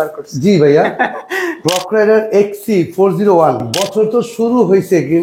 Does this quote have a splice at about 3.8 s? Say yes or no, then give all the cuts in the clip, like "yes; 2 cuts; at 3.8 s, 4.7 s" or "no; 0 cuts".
yes; 2 cuts; at 1.6 s, 3.8 s